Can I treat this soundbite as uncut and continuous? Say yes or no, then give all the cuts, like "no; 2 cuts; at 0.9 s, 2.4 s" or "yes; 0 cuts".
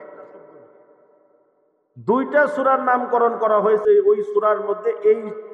no; 1 cut; at 3.8 s